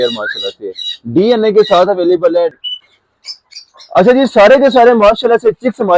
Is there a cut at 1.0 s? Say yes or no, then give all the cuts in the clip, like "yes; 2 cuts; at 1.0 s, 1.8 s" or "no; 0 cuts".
no; 1 cut; at 2.6 s